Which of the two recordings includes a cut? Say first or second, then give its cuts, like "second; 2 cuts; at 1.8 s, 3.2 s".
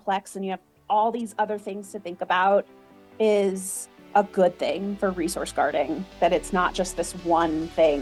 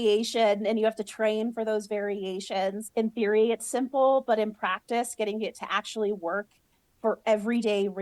second; 1 cut; at 2.8 s